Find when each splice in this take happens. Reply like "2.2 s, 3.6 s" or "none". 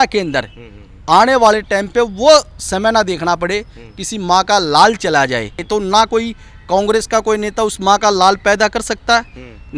5.6 s